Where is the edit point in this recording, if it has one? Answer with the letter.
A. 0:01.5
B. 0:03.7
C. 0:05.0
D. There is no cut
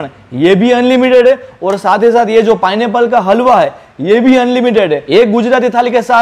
C